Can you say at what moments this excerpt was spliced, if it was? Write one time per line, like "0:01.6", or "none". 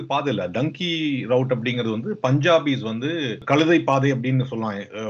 0:03.3